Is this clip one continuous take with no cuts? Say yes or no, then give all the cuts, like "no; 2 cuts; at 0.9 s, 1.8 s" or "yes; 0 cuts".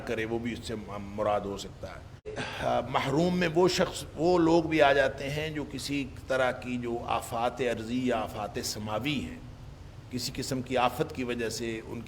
no; 1 cut; at 2.4 s